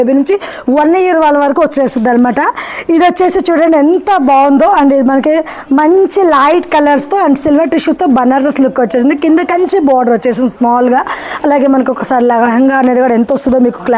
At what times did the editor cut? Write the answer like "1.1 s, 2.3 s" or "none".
none